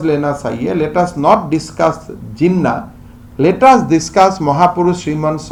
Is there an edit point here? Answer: no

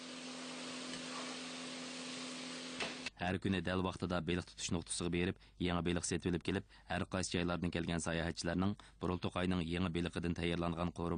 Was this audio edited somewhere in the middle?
no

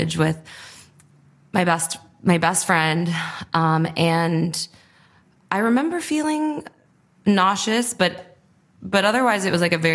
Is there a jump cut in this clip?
no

